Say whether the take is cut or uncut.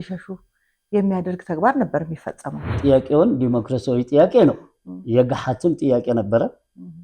cut